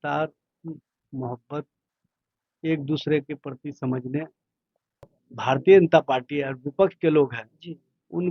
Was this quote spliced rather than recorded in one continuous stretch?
yes; 1 cut; at 5.0 s

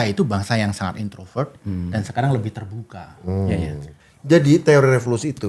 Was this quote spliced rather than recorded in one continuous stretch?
yes; 1 cut; at 3.9 s

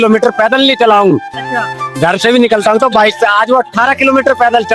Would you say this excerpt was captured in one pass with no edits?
yes; 0 cuts

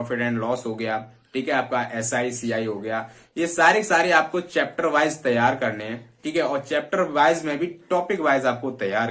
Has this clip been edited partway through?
no; 0 cuts

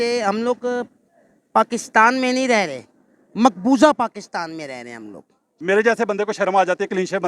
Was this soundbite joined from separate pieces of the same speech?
yes; 1 cut; at 5.6 s

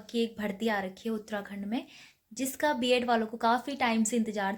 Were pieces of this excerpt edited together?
no; 0 cuts

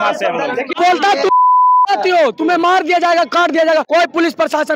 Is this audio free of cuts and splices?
no; 2 cuts; at 0.7 s, 3.9 s

